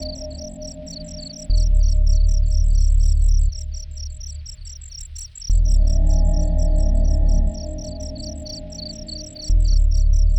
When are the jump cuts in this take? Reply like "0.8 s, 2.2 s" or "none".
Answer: none

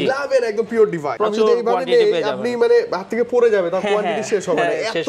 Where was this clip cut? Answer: 1.1 s

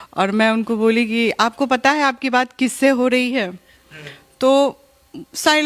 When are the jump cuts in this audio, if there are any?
none

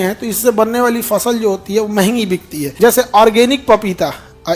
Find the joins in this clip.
2.6 s

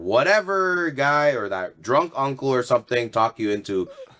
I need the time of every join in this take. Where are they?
none

